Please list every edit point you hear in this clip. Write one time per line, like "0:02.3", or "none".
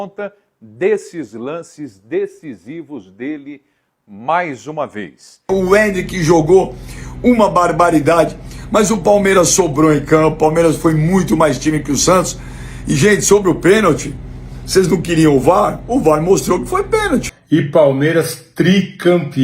0:05.5
0:17.3